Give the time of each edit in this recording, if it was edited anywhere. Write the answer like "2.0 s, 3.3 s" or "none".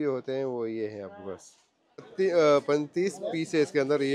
2.1 s